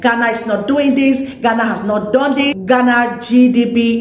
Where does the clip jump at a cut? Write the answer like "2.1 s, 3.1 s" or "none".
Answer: 2.6 s